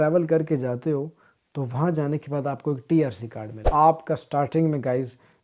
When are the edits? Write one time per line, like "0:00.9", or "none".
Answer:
0:03.6